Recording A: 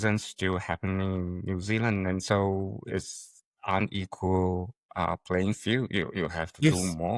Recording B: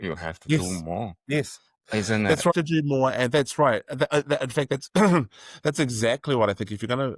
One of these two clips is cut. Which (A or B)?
B